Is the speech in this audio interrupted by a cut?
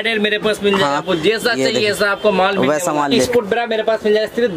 yes; 1 cut; at 3.3 s

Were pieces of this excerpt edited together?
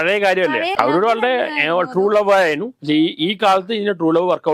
yes; 2 cuts; at 0.7 s, 2.7 s

